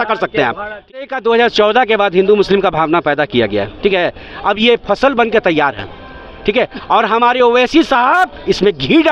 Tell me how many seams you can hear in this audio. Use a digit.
1